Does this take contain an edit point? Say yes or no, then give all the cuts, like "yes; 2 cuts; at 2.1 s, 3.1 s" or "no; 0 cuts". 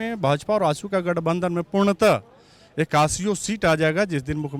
no; 0 cuts